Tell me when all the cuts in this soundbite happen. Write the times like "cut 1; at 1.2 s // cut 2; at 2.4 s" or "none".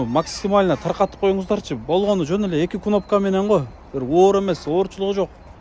none

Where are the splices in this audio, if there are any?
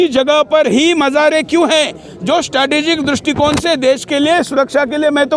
none

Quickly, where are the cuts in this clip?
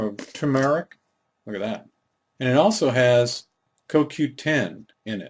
none

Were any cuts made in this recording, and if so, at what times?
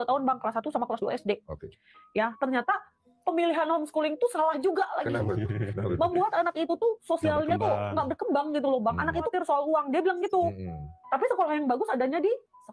cut 1; at 9.3 s

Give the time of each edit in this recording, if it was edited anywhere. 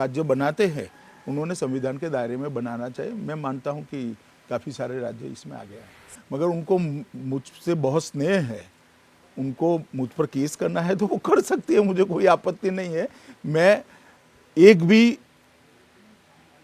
cut 1; at 5.9 s

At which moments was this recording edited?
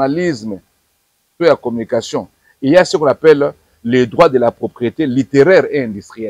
none

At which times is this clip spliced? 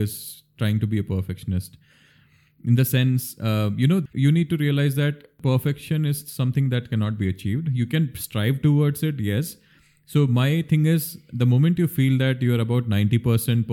cut 1; at 4.0 s // cut 2; at 5.3 s

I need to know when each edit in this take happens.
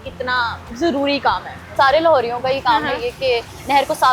cut 1; at 1.6 s

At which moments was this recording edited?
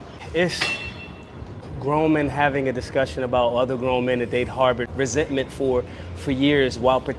cut 1; at 1.4 s

